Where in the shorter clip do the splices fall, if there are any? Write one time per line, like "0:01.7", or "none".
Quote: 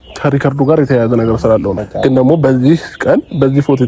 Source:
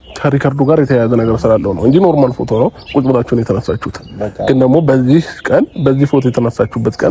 0:01.7